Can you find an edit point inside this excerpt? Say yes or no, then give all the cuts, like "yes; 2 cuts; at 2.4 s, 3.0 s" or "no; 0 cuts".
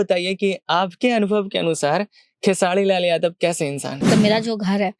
yes; 1 cut; at 4.0 s